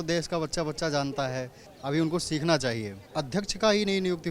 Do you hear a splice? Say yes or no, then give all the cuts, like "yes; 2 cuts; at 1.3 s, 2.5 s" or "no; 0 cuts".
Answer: yes; 2 cuts; at 1.7 s, 3.0 s